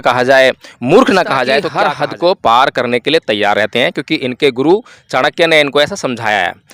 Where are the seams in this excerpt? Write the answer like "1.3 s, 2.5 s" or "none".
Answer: 1.7 s